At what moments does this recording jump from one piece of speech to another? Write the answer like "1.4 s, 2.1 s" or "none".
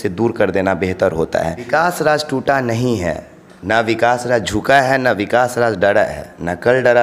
1.6 s

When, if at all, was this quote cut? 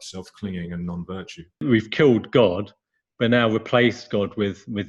1.6 s

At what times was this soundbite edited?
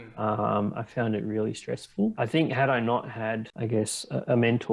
2.1 s, 3.5 s

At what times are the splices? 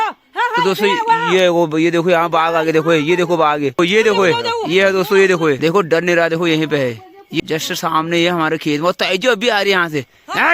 3.8 s, 5.6 s, 7.4 s

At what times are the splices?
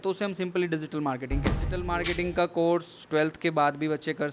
1.8 s

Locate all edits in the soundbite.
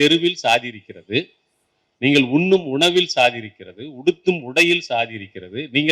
none

